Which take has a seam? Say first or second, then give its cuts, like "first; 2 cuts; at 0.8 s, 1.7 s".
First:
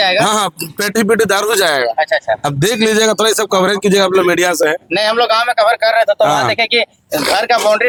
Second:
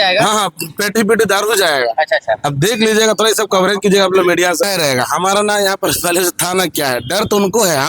second; 1 cut; at 4.6 s